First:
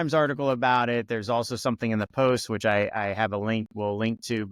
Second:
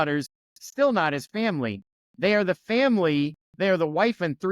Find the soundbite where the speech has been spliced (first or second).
second